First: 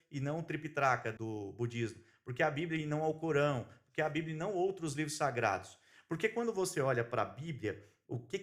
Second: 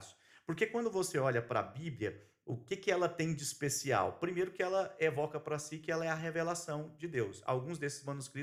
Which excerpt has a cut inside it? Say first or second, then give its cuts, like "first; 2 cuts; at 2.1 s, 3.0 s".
first; 1 cut; at 1.1 s